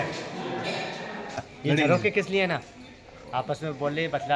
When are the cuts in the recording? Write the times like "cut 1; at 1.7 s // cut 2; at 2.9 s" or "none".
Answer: cut 1; at 1.5 s